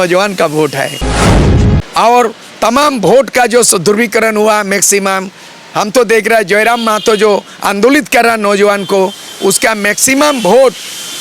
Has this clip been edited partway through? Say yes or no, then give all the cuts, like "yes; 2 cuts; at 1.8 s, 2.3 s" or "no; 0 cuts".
yes; 1 cut; at 1.4 s